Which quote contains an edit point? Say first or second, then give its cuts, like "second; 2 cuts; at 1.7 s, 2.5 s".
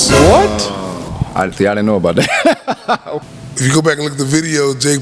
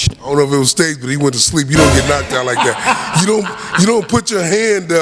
first; 1 cut; at 3.1 s